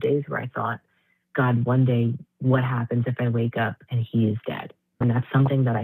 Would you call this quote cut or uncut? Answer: uncut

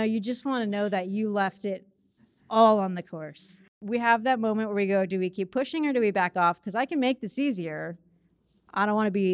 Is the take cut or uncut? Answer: cut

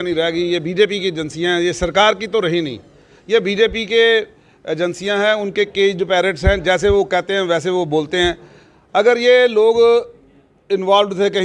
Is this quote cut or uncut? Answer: uncut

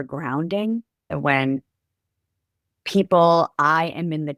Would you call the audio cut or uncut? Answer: cut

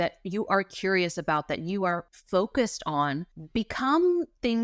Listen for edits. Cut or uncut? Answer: cut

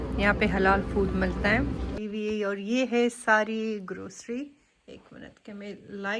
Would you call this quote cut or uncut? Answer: cut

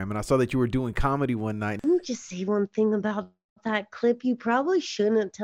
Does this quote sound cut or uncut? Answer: cut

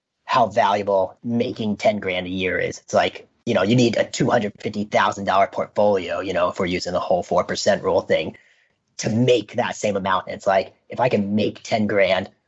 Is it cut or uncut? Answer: cut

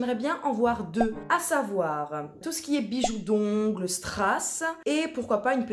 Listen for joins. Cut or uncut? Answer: cut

